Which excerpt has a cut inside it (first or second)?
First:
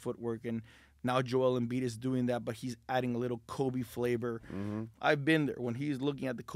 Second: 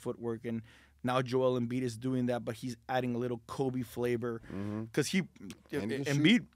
first